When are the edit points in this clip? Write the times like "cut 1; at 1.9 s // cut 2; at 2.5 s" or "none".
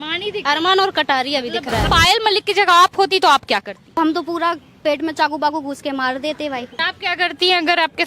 cut 1; at 1.8 s // cut 2; at 4.0 s // cut 3; at 6.8 s